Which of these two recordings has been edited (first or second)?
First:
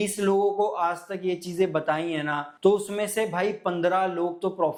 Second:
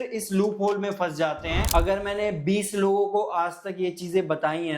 second